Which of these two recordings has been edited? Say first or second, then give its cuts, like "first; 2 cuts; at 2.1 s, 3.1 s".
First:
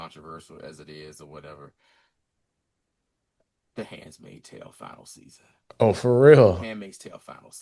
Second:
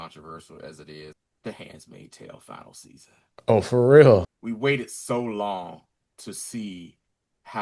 second; 2 cuts; at 1.2 s, 4.3 s